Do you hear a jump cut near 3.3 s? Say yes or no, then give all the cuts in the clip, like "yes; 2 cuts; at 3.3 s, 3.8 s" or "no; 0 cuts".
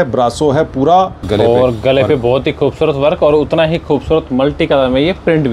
no; 1 cut; at 1.2 s